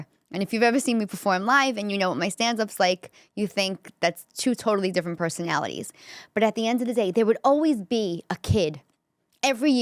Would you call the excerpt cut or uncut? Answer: uncut